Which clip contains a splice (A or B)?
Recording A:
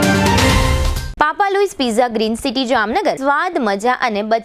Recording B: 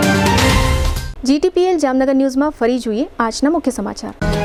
A